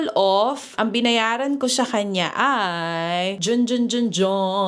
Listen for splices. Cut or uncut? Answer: uncut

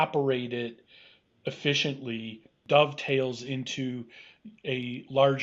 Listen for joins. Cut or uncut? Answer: cut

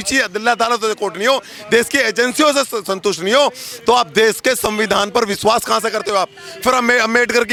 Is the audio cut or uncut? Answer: uncut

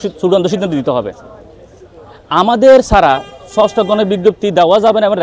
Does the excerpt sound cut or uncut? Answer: uncut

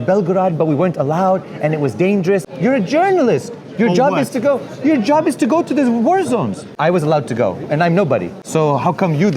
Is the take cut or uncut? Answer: cut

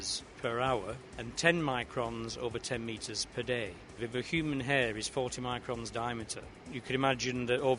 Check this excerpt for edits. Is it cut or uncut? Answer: cut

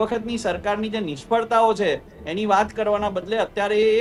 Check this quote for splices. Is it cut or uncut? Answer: uncut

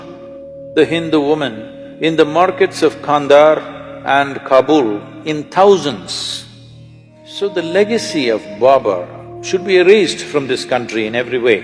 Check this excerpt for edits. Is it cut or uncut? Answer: cut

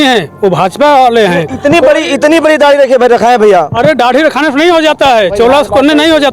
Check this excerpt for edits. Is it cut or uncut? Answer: uncut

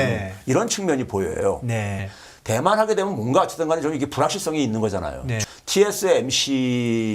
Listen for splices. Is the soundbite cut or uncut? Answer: cut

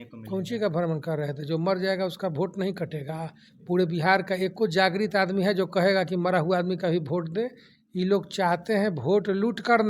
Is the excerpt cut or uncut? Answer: uncut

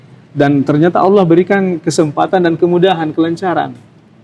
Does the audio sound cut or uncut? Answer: uncut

